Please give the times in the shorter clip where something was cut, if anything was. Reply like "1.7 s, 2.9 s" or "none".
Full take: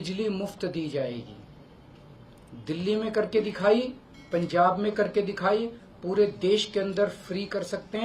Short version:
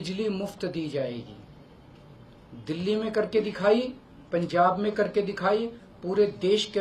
none